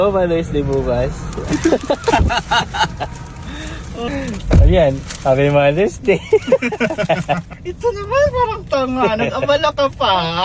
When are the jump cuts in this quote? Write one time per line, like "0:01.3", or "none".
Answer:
0:04.1
0:07.6